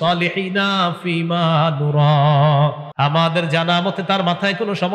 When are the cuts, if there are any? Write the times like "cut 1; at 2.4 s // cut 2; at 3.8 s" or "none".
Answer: cut 1; at 2.8 s